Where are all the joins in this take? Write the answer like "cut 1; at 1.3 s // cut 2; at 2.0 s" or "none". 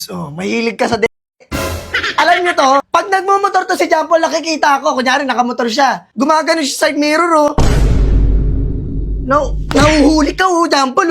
cut 1; at 2.9 s // cut 2; at 6.1 s